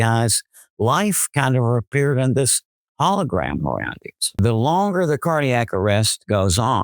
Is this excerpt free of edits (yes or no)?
no